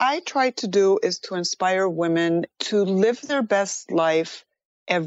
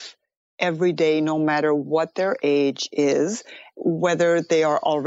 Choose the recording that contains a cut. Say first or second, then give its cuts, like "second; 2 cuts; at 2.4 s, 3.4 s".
first; 2 cuts; at 2.5 s, 3.2 s